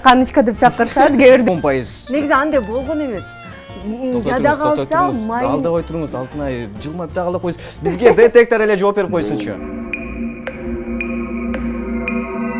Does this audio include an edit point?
yes; 1 cut; at 1.4 s

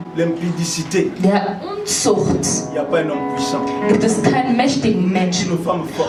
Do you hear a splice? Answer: no; 0 cuts

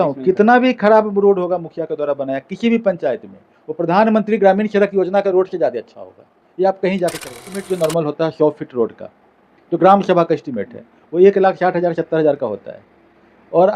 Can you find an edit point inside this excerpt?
yes; 1 cut; at 7.7 s

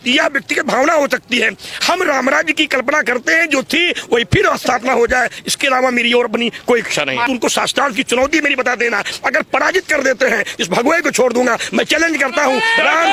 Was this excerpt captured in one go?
no; 1 cut; at 7.3 s

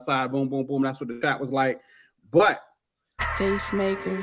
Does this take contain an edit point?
yes; 1 cut; at 3.3 s

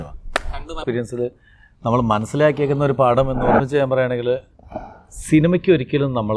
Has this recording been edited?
yes; 2 cuts; at 0.8 s, 3.6 s

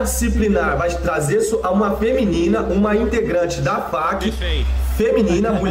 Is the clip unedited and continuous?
yes; 0 cuts

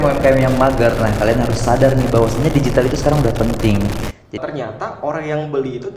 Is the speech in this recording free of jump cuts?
no; 1 cut; at 4.4 s

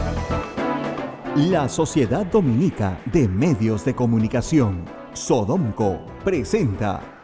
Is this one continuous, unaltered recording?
no; 1 cut; at 1.2 s

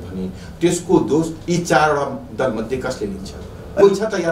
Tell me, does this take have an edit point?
no; 0 cuts

